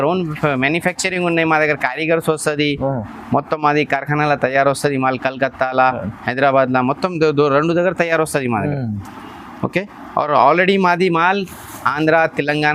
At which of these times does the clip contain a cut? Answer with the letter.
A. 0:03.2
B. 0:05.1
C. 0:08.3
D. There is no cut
D